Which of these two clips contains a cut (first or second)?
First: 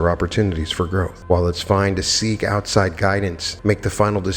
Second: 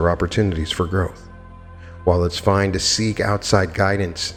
first